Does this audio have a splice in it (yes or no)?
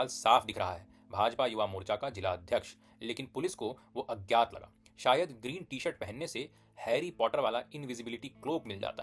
no